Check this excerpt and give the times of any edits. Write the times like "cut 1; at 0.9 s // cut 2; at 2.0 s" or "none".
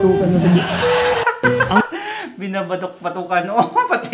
none

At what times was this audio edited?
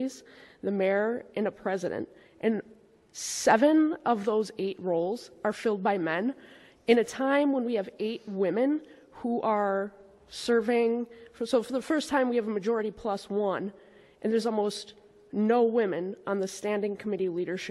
none

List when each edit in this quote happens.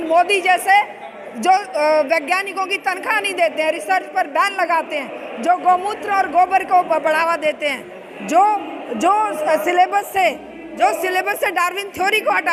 none

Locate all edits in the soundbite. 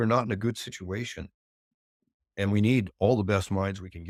none

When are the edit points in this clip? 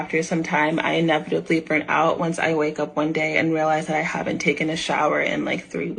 none

